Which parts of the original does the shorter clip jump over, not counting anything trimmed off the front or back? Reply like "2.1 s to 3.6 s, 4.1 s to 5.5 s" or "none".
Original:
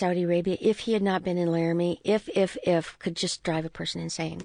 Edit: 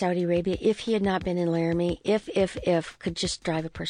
none